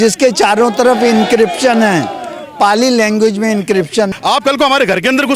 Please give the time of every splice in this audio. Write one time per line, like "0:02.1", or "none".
0:04.1